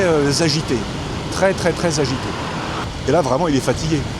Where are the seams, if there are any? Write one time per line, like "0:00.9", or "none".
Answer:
0:02.9